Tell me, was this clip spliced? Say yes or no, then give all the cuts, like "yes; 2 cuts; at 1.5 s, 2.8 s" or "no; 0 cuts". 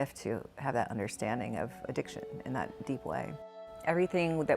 yes; 1 cut; at 3.4 s